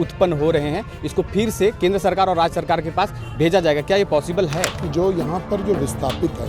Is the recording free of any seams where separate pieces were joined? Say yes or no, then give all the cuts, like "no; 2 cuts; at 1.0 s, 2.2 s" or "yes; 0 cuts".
no; 1 cut; at 4.8 s